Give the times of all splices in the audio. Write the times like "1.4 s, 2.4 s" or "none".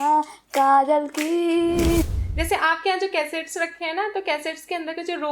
2.1 s